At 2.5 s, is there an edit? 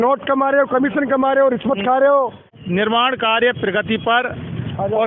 yes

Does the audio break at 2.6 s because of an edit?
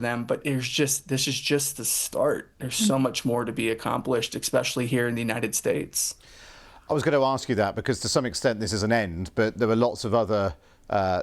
no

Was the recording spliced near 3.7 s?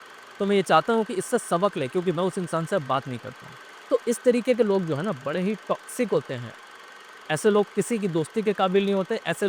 yes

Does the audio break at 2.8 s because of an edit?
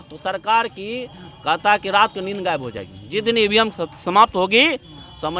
no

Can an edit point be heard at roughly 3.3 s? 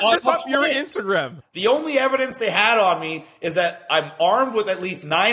no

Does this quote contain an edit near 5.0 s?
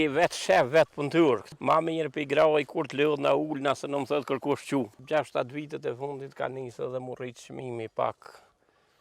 yes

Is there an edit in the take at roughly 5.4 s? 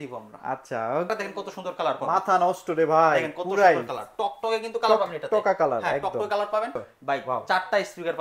no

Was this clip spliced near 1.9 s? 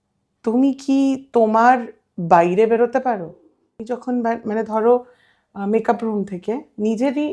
no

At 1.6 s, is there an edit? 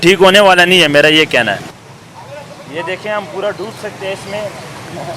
yes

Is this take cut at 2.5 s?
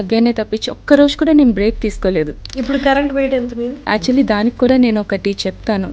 yes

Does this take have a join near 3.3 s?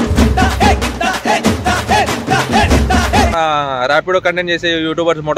yes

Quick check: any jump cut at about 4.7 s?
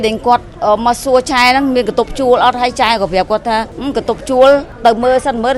yes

